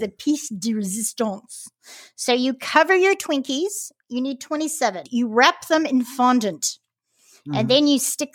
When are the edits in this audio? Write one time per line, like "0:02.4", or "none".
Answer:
0:05.1

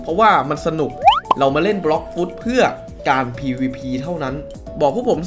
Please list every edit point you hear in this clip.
0:04.3

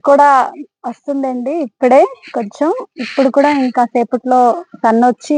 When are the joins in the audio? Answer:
none

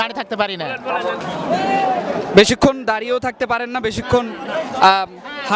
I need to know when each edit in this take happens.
0:01.2

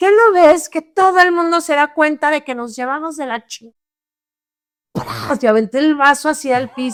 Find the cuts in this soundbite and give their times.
none

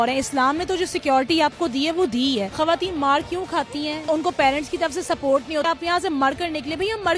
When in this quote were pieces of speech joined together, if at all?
0:02.5
0:04.1
0:05.6

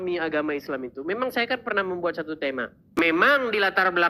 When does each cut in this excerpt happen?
0:02.4

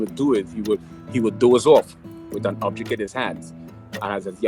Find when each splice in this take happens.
0:01.3

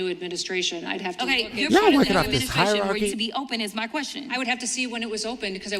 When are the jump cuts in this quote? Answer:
0:03.1

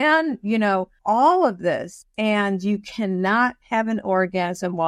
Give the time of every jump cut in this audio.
none

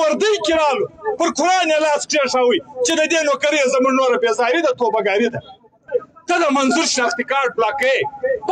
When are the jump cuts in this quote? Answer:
0:05.8

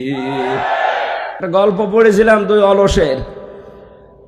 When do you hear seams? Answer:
0:01.3

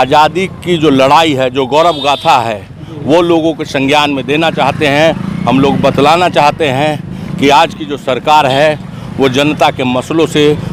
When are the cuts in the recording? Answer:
none

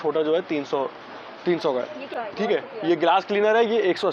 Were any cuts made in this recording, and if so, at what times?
0:02.0

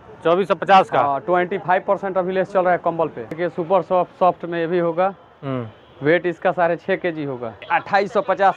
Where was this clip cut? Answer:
0:03.4
0:07.6

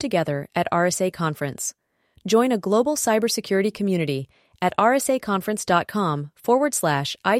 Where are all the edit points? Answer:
none

